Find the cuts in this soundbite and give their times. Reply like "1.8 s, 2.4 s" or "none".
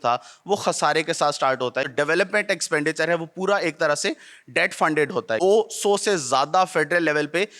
1.9 s, 5.4 s